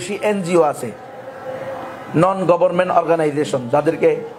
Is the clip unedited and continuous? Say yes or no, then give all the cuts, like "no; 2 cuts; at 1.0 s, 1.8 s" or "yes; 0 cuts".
yes; 0 cuts